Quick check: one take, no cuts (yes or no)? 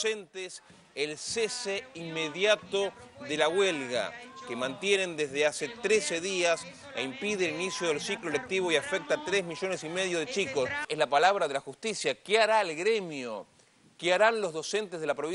yes